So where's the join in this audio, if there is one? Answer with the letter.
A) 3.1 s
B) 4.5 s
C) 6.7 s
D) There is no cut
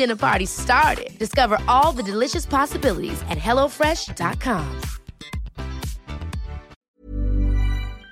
C